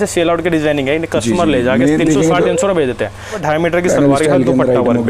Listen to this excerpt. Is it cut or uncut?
cut